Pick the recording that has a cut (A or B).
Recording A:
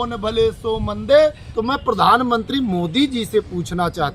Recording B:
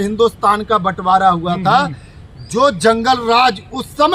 A